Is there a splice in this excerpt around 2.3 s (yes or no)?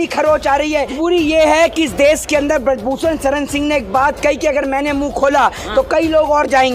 no